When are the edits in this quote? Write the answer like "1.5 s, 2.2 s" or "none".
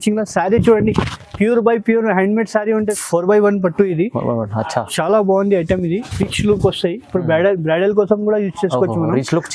2.9 s